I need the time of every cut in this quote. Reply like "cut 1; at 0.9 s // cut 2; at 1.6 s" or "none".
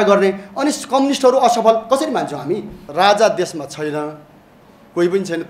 cut 1; at 2.9 s